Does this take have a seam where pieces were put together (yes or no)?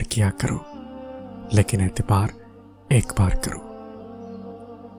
yes